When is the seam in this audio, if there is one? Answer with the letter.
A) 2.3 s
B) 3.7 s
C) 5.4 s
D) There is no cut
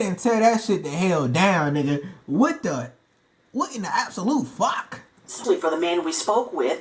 C